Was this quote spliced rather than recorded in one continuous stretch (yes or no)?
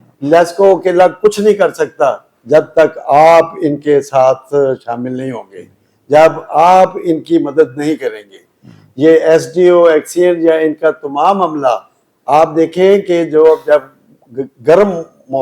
no